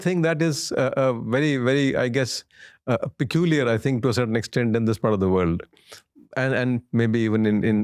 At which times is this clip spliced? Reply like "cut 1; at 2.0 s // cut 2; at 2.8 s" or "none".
none